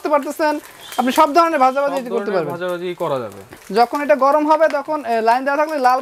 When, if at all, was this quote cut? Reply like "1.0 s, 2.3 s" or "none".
3.6 s